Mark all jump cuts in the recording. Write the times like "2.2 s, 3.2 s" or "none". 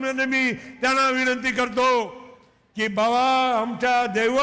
none